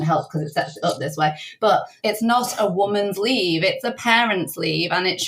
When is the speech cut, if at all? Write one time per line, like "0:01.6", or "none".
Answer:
0:01.9